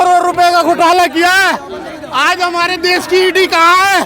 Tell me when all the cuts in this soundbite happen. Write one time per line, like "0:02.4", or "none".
none